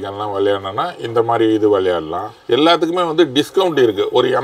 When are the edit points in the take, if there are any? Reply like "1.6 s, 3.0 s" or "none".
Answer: 2.3 s